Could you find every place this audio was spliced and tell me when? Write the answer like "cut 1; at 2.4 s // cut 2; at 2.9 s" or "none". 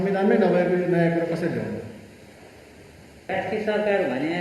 cut 1; at 3.3 s